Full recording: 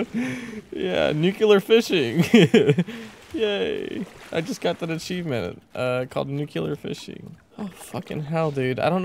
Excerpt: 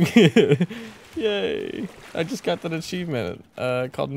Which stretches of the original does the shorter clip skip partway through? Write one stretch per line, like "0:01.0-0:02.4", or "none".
none

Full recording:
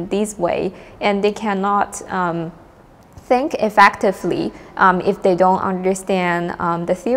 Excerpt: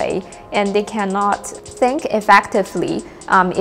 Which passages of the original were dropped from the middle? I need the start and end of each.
0:02.0-0:03.0

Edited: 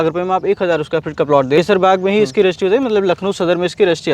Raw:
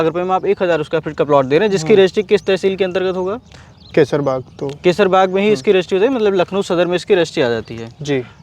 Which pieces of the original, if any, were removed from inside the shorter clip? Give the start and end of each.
0:01.6-0:04.9

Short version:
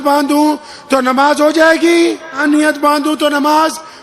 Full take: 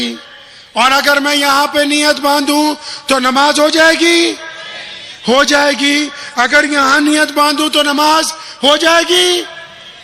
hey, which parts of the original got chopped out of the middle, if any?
0:04.6-0:06.9

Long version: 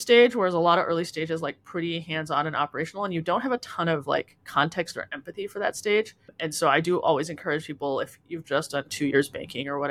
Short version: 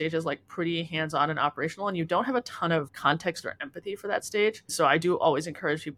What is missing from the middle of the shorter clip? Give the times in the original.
0:04.0-0:04.4
0:06.2-0:06.5

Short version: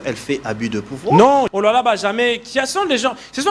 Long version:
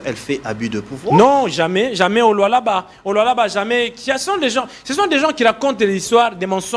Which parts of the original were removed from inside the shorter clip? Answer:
0:01.5-0:03.0

